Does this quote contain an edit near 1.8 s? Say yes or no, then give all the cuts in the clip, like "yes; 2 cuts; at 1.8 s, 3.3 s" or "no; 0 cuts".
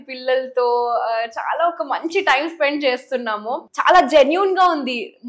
no; 1 cut; at 3.6 s